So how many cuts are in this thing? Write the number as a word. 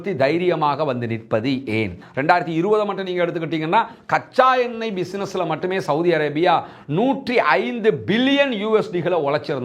one